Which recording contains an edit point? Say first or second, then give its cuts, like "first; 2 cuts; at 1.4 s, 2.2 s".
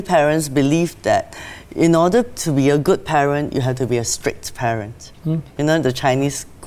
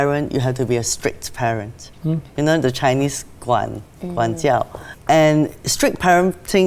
second; 1 cut; at 5.3 s